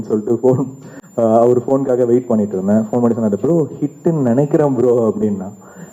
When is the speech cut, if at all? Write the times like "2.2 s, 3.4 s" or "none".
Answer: none

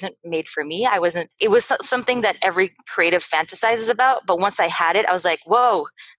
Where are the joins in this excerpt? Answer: 1.3 s

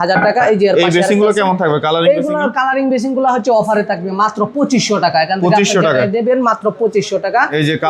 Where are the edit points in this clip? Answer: none

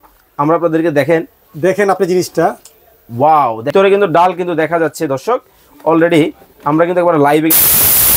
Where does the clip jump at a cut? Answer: 3.7 s

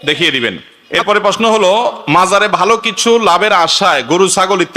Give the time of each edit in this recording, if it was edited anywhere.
1.0 s

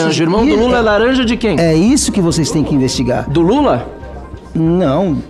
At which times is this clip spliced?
none

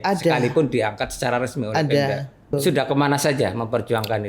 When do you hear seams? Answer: 2.5 s

